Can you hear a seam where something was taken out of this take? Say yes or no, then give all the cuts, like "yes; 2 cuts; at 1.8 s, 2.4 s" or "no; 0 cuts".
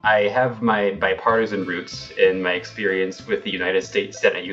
no; 0 cuts